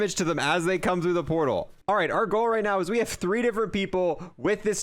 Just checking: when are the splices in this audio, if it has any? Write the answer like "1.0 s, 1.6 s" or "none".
1.8 s

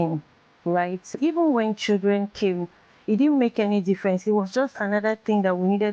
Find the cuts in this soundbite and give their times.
1.2 s

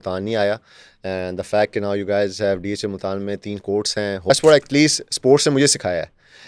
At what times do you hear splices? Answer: 4.3 s

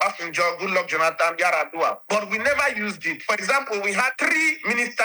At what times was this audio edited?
3.1 s, 4.1 s

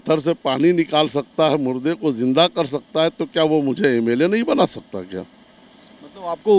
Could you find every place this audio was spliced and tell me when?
none

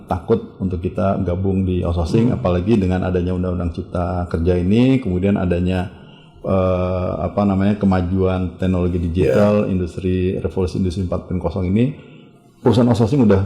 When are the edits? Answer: none

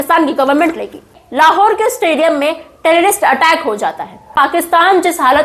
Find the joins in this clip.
1.2 s, 4.3 s

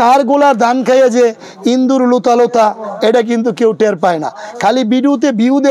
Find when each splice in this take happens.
none

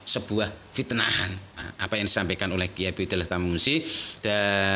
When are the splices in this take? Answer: 1.7 s

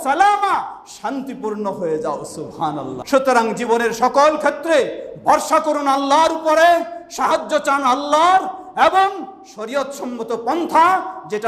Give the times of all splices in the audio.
2.9 s

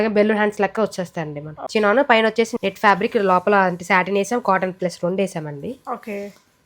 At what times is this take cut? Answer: 1.5 s, 2.5 s

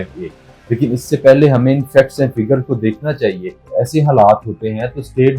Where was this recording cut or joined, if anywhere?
3.7 s

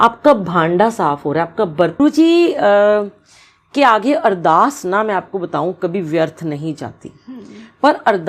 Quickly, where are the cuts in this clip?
2.0 s

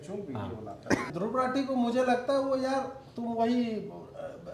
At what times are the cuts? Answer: 1.1 s

